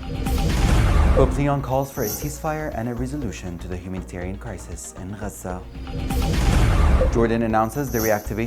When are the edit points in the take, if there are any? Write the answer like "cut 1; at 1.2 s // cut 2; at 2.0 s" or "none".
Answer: cut 1; at 0.9 s